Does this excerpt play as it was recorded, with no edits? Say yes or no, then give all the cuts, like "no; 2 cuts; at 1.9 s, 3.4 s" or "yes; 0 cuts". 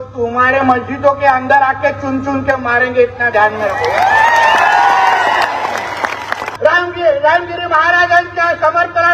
no; 1 cut; at 6.4 s